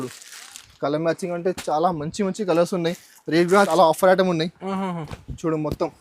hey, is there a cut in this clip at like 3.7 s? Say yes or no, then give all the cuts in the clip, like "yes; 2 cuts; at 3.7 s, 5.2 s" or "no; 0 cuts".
yes; 1 cut; at 3.7 s